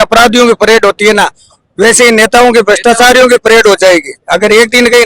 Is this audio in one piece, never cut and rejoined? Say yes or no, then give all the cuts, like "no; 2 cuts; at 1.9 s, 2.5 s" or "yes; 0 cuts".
yes; 0 cuts